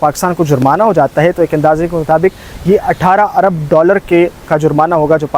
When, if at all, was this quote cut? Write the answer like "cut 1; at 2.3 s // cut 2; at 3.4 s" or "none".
none